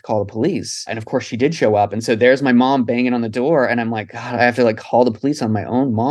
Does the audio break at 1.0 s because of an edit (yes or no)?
yes